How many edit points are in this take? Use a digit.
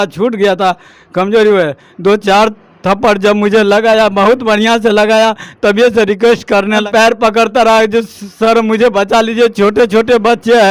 1